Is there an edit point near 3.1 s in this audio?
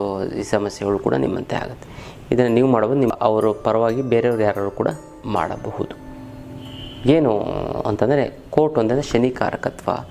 yes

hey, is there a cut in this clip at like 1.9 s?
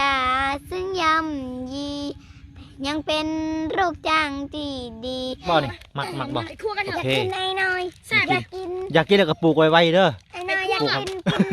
no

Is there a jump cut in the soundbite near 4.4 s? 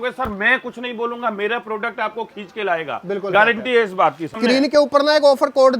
yes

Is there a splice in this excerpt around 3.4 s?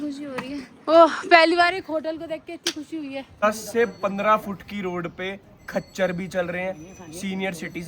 yes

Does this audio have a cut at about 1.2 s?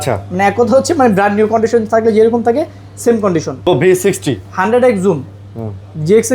no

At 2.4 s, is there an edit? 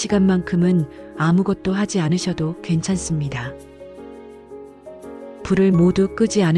no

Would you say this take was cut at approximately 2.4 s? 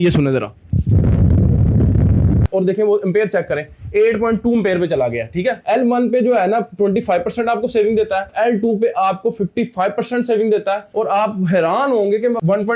yes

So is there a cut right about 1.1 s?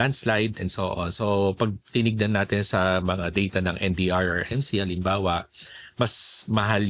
no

